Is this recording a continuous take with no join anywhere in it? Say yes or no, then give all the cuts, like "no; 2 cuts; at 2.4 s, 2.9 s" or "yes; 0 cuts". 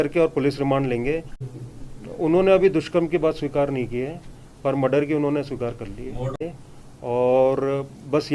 no; 2 cuts; at 1.4 s, 6.4 s